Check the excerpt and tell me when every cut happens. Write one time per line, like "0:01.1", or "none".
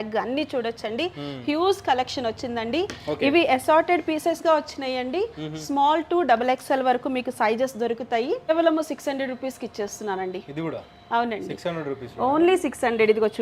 0:08.5

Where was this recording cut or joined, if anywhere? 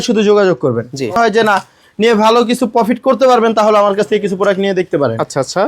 0:01.2

